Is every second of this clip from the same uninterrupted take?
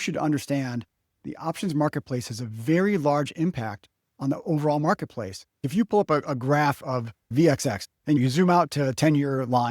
no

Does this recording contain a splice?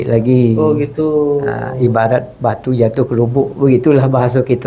no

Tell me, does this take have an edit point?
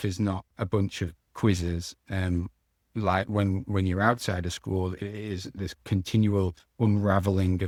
no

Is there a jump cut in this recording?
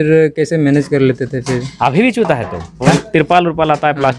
yes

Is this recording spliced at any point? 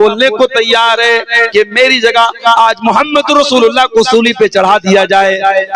no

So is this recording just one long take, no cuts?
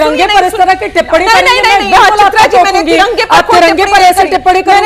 yes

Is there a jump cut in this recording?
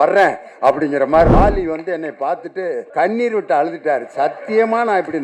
yes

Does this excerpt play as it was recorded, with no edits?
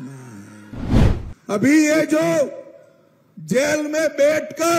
no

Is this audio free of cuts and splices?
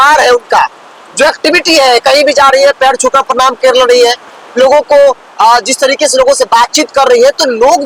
yes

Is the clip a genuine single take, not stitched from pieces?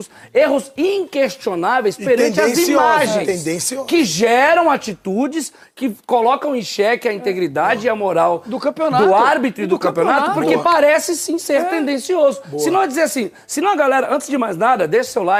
yes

